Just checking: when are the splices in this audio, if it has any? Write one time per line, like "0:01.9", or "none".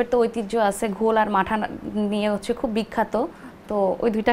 none